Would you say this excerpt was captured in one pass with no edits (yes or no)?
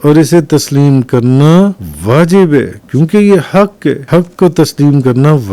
no